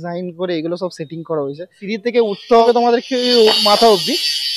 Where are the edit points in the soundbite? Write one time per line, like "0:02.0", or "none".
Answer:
0:01.8
0:02.7

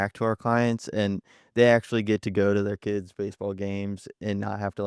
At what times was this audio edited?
none

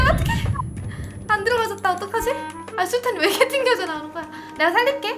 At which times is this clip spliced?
0:02.7

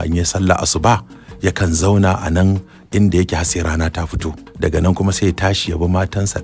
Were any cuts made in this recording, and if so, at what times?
0:04.4

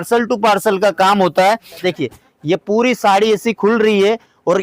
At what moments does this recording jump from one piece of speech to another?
0:01.9

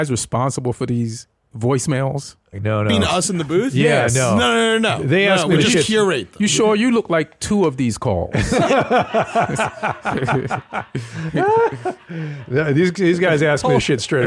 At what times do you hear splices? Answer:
0:02.6

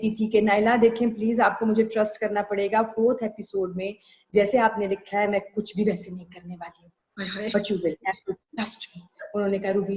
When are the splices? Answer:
none

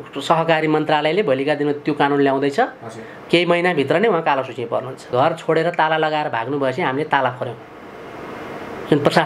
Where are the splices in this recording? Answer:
0:05.1

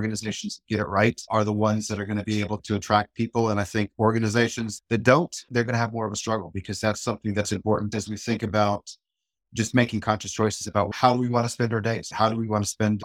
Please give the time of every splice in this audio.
0:07.9
0:10.9
0:12.1

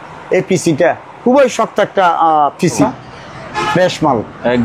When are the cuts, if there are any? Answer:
0:02.9

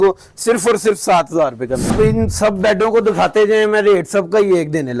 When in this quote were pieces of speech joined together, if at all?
0:01.9

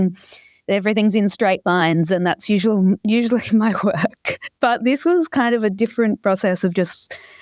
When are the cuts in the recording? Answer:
none

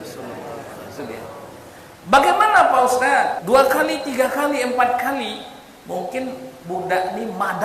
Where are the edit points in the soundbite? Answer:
0:03.4

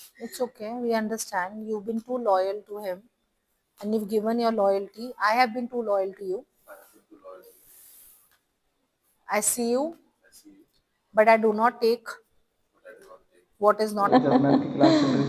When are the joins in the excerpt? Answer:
0:14.1

